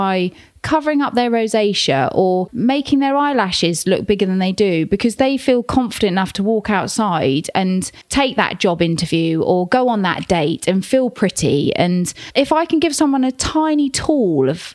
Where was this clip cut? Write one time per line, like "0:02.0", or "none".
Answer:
0:02.4
0:08.0
0:12.2